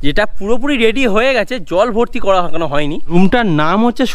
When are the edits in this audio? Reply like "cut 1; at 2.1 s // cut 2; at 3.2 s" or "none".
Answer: cut 1; at 3.0 s